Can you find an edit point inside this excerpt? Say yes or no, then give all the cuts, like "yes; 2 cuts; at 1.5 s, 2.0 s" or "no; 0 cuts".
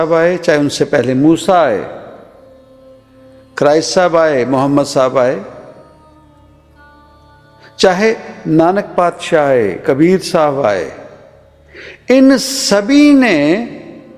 no; 0 cuts